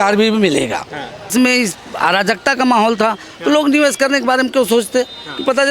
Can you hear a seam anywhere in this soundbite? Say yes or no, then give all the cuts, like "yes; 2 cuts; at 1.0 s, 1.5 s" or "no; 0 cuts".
yes; 1 cut; at 1.3 s